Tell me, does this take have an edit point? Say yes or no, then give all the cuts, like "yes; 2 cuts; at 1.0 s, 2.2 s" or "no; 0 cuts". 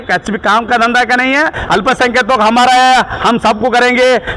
yes; 1 cut; at 1.6 s